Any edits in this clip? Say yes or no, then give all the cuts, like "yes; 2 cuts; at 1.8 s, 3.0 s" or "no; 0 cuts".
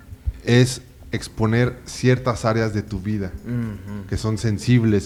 no; 0 cuts